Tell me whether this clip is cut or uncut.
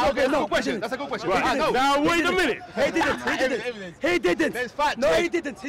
uncut